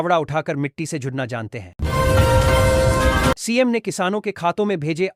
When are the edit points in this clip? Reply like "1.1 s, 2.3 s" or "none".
1.7 s, 3.4 s